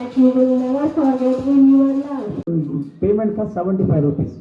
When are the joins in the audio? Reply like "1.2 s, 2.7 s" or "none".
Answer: 2.4 s